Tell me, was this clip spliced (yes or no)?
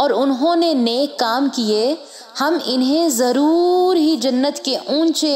no